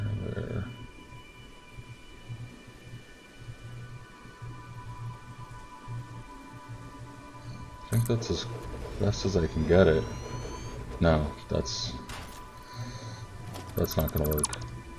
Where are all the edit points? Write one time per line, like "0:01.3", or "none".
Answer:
none